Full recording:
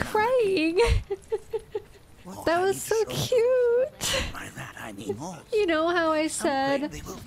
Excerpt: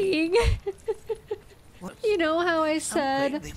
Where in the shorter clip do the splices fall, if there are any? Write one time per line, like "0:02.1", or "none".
0:01.9